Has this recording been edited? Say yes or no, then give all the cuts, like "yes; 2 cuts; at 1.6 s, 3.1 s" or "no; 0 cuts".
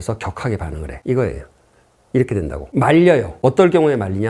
yes; 3 cuts; at 0.9 s, 2.6 s, 3.3 s